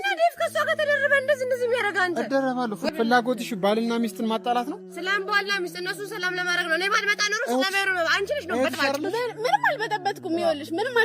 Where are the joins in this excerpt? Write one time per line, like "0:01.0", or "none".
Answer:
0:02.9